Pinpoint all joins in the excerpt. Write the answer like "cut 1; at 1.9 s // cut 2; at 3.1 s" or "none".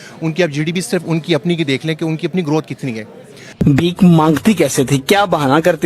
cut 1; at 3.5 s